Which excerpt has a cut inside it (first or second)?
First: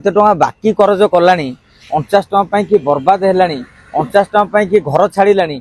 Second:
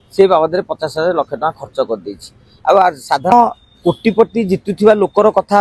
second